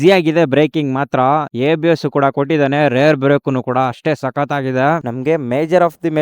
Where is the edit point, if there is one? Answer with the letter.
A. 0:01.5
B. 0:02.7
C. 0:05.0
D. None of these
C